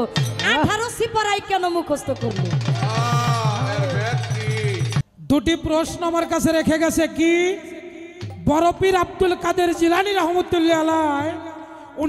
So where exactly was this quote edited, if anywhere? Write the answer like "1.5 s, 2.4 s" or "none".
5.1 s